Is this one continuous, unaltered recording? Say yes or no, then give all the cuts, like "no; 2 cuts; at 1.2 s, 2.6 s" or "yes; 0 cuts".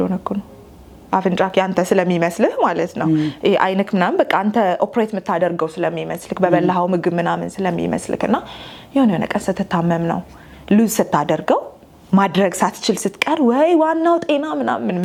yes; 0 cuts